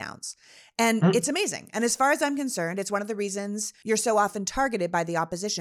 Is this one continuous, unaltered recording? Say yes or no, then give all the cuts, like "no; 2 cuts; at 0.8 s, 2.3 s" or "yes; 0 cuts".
no; 1 cut; at 3.7 s